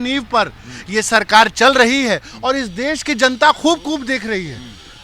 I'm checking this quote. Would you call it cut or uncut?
uncut